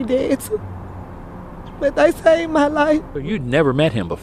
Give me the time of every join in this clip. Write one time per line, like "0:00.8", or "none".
0:03.1